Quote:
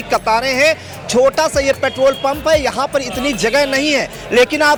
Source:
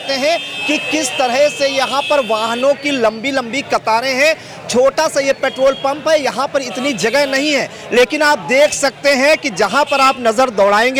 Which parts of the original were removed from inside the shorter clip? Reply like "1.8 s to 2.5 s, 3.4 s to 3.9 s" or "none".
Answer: none